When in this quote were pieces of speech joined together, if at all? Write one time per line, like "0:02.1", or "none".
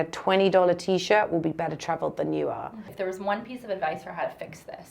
0:02.8